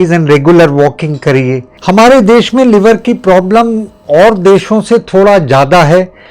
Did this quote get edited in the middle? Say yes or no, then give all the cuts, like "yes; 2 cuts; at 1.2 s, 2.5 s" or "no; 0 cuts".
yes; 1 cut; at 1.7 s